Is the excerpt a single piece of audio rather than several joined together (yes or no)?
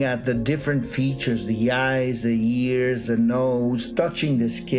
no